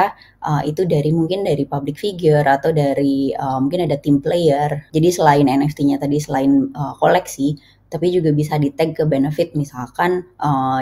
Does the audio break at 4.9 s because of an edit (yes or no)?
yes